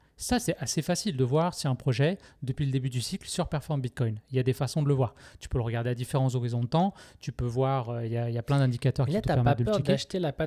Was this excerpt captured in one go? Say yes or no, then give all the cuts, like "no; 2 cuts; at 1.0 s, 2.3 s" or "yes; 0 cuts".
yes; 0 cuts